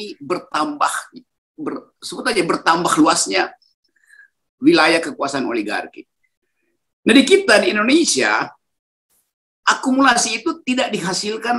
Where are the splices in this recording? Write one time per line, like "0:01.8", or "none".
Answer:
0:06.2